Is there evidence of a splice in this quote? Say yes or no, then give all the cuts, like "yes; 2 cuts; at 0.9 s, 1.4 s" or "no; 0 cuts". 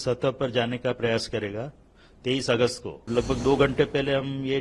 yes; 1 cut; at 3.1 s